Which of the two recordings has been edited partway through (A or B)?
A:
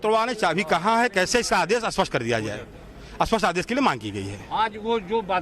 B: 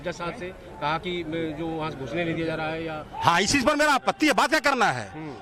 A